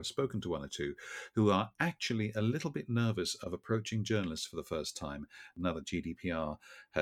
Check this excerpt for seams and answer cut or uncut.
uncut